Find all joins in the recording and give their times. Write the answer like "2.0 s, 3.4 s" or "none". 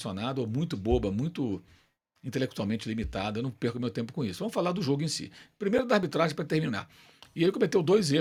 none